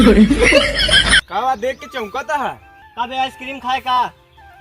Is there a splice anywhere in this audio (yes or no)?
yes